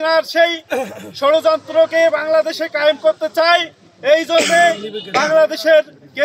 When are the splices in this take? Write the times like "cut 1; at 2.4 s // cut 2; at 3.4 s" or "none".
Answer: none